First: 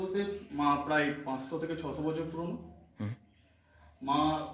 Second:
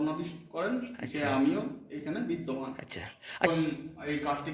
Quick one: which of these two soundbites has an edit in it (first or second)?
second